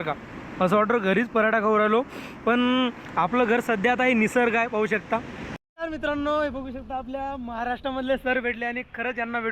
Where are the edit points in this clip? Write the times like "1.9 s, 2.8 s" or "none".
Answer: 5.6 s